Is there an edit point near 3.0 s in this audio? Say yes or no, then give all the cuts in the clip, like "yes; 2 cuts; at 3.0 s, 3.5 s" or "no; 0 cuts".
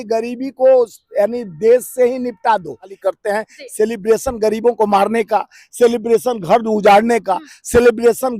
yes; 1 cut; at 3.0 s